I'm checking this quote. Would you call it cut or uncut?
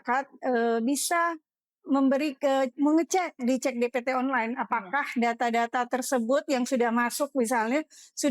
uncut